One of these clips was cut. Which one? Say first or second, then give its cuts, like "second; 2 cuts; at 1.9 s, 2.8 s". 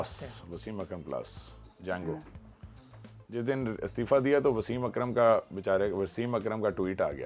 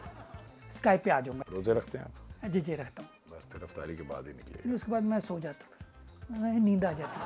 second; 2 cuts; at 1.4 s, 3.3 s